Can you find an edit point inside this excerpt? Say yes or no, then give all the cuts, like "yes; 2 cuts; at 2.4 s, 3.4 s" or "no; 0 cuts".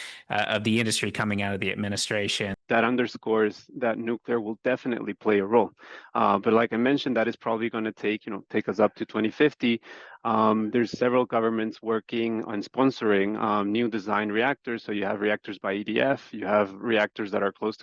yes; 1 cut; at 2.6 s